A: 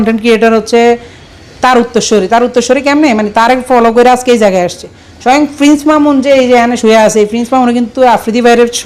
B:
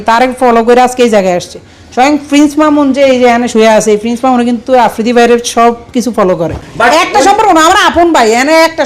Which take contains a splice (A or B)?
B